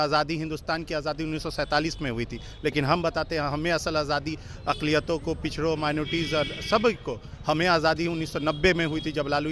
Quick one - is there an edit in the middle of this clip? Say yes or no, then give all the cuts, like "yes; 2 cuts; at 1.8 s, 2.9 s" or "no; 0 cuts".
no; 0 cuts